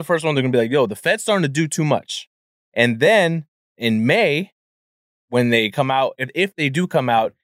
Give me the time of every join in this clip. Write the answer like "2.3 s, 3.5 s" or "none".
2.6 s